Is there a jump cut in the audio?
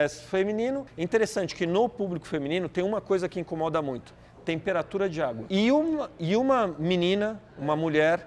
yes; 2 cuts; at 0.9 s, 5.4 s

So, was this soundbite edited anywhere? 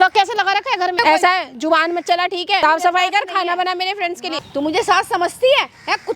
yes; 3 cuts; at 1.0 s, 2.6 s, 4.4 s

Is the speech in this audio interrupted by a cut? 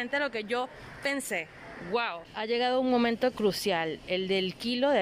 yes; 1 cut; at 2.2 s

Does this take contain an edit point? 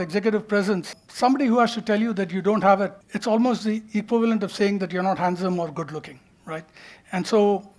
yes; 2 cuts; at 1.0 s, 3.1 s

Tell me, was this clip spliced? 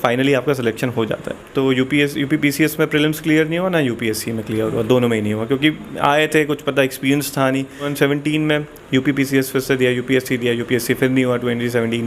yes; 2 cuts; at 1.4 s, 7.9 s

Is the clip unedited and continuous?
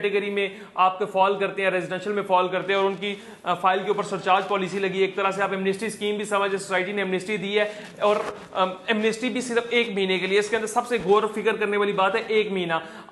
yes; 0 cuts

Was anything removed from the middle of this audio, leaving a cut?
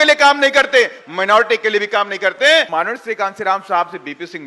yes; 1 cut; at 2.7 s

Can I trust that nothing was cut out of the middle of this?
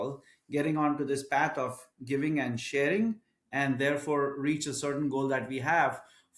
yes; 0 cuts

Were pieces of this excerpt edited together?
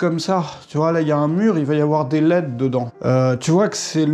yes; 1 cut; at 2.9 s

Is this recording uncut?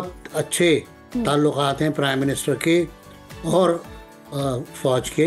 yes; 0 cuts

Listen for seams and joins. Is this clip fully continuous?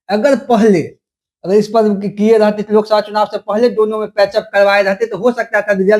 yes; 0 cuts

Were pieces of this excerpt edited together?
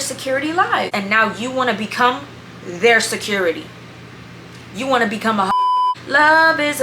yes; 2 cuts; at 0.9 s, 5.5 s

